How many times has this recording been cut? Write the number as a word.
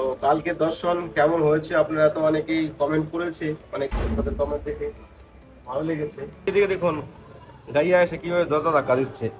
one